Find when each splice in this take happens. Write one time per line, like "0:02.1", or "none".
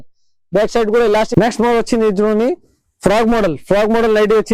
0:01.3